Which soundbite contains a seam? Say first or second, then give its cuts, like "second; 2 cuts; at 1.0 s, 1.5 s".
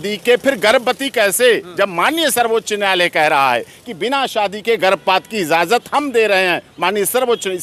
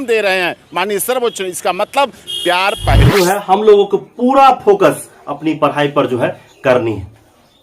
second; 1 cut; at 3.1 s